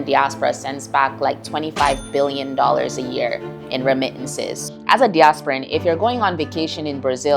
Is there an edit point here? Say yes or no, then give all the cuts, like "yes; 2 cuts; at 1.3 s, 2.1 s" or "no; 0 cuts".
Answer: yes; 1 cut; at 4.6 s